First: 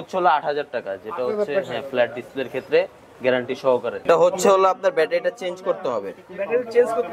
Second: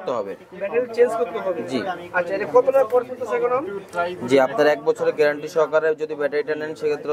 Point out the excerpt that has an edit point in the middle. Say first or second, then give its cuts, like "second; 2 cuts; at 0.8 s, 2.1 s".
first; 1 cut; at 4.0 s